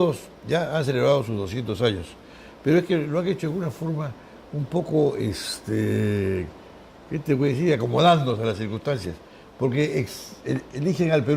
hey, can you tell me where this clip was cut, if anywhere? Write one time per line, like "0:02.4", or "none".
0:06.8